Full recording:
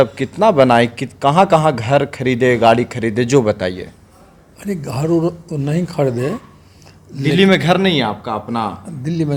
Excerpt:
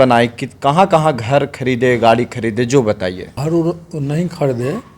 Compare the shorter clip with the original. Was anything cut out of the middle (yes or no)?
yes